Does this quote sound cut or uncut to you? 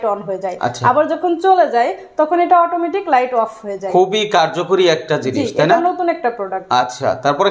uncut